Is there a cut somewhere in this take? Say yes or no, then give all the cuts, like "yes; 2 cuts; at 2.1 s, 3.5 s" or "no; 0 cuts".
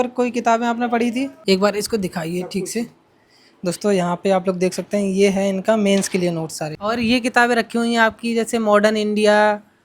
yes; 2 cuts; at 1.4 s, 6.6 s